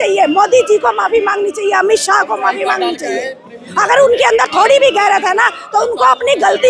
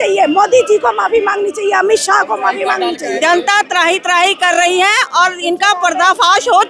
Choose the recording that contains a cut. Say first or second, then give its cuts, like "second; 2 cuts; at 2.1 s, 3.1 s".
second; 1 cut; at 3.2 s